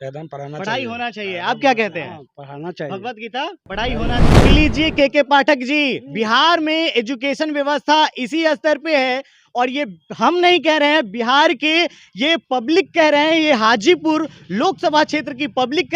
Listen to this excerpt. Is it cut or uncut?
cut